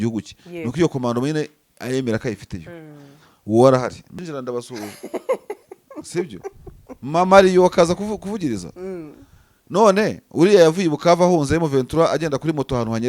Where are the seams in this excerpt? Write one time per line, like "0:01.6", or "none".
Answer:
0:04.2